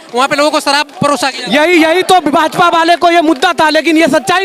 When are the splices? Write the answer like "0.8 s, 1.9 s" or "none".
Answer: none